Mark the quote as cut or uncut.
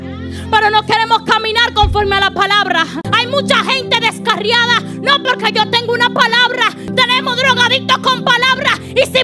cut